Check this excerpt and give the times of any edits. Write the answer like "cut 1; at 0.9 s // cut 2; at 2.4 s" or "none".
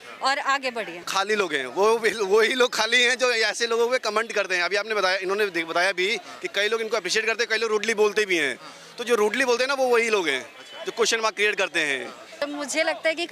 cut 1; at 1.1 s // cut 2; at 12.4 s